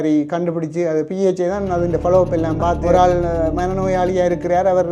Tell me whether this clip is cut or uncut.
cut